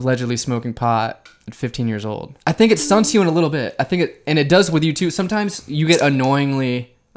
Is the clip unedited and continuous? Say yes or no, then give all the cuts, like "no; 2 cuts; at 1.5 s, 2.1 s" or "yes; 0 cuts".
no; 1 cut; at 2.3 s